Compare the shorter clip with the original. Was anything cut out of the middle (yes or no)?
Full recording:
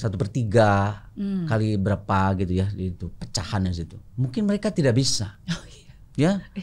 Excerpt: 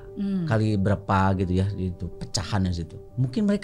no